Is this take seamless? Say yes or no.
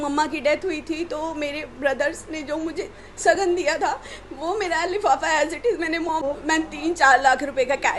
no